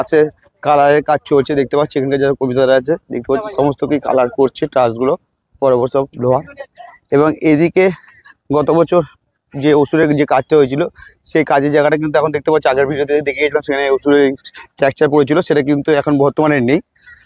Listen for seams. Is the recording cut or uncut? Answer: uncut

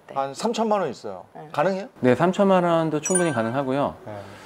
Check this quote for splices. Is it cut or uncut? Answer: cut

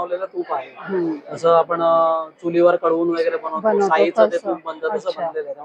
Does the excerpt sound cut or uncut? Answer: uncut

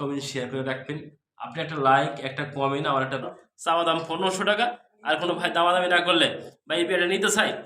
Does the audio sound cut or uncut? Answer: cut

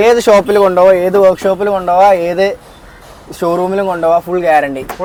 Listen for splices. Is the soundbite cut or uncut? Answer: uncut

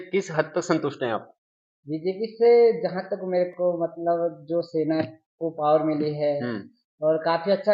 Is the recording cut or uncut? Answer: uncut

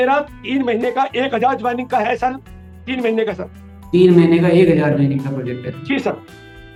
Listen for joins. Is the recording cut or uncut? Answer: uncut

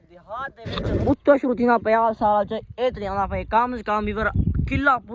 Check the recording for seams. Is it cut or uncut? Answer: cut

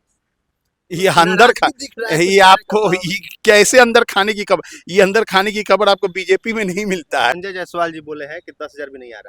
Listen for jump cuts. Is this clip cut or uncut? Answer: cut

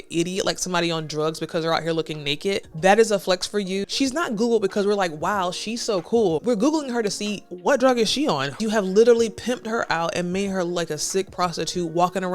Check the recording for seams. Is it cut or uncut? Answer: cut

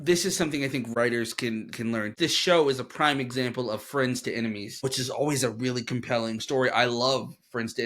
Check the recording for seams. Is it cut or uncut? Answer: cut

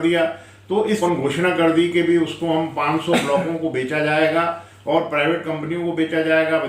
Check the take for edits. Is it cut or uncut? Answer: cut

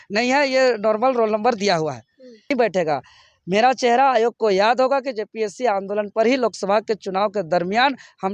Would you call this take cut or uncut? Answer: cut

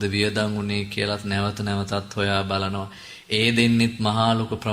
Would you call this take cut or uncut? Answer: uncut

